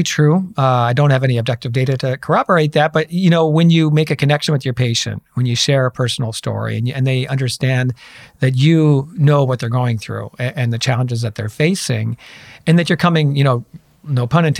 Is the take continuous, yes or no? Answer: yes